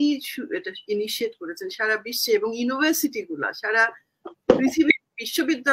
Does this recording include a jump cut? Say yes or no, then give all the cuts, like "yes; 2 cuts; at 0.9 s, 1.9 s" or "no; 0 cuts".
no; 0 cuts